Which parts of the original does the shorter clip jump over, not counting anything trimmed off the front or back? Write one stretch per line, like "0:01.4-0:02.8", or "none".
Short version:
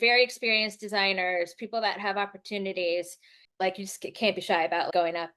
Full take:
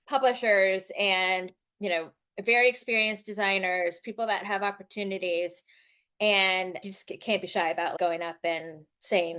0:06.1-0:06.7